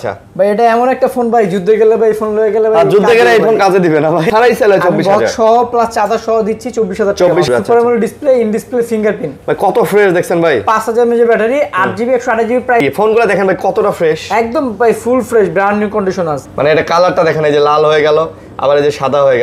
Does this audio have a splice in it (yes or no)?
yes